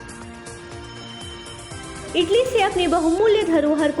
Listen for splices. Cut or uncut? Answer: cut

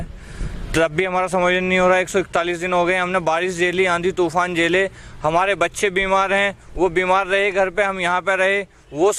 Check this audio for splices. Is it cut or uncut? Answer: uncut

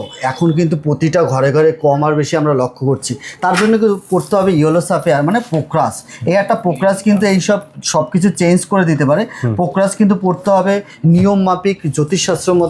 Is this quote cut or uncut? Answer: uncut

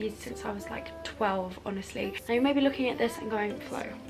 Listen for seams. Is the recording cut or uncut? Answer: cut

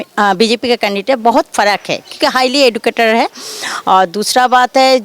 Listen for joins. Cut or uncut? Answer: uncut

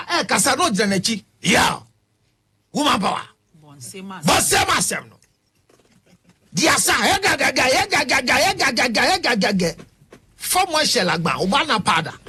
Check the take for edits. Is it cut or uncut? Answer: uncut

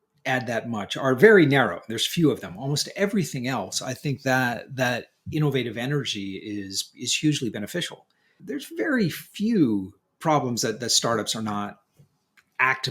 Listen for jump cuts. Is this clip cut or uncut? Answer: cut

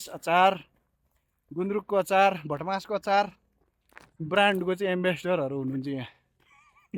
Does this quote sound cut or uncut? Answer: uncut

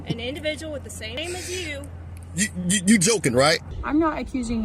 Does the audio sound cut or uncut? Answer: cut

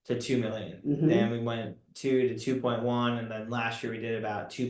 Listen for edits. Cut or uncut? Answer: uncut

